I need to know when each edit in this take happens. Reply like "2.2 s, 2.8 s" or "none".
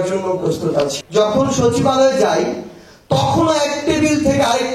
1.0 s